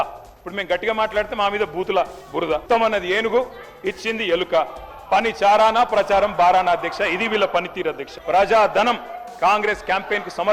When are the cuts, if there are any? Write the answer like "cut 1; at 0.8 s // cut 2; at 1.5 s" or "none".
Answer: cut 1; at 8.1 s